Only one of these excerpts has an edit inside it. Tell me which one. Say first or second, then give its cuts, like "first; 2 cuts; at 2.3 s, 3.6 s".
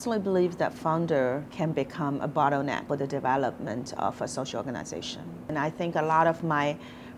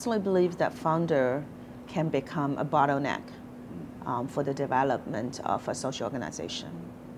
first; 3 cuts; at 1.5 s, 2.8 s, 5.5 s